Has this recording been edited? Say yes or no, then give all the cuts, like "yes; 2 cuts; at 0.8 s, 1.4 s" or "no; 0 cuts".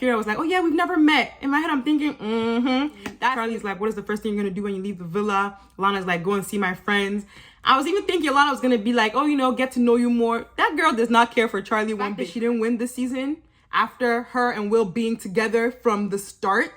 yes; 2 cuts; at 3.1 s, 12.2 s